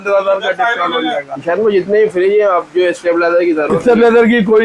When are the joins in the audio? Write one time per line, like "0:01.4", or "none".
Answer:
0:01.3